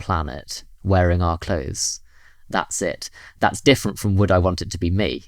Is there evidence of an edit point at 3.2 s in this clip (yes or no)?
yes